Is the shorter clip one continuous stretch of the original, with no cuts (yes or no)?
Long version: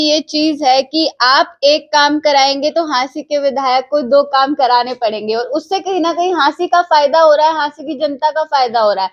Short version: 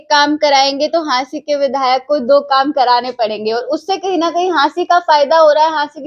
yes